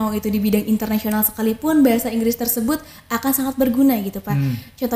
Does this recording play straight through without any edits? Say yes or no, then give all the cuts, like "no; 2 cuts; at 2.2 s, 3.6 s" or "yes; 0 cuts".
yes; 0 cuts